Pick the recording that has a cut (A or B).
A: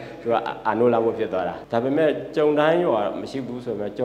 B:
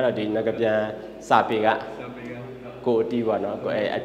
A